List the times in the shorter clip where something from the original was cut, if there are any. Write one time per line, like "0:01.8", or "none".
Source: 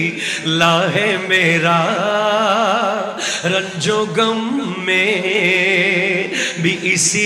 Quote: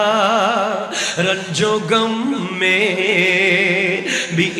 none